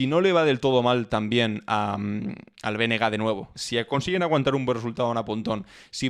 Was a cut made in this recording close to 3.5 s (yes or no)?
yes